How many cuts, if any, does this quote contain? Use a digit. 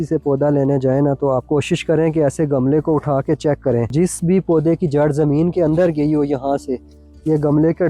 2